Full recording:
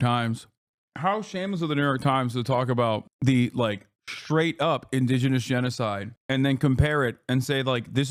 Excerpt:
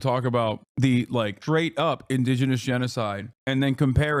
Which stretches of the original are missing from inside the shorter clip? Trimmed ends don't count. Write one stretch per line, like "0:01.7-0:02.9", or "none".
0:03.8-0:04.2

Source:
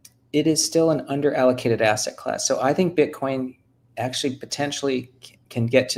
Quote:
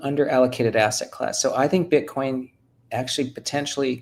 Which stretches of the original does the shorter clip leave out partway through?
none

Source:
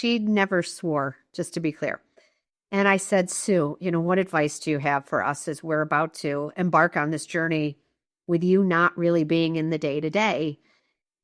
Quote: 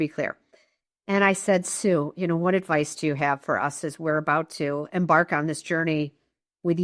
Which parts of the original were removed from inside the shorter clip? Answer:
none

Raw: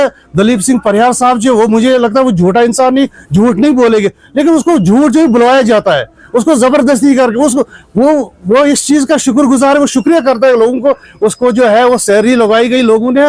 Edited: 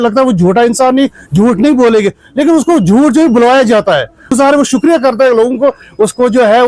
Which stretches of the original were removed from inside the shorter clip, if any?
0:06.3-0:09.5

